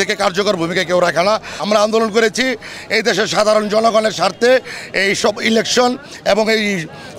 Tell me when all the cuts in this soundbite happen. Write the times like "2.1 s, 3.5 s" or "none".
1.6 s